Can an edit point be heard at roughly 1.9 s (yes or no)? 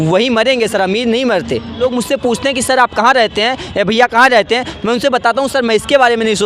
yes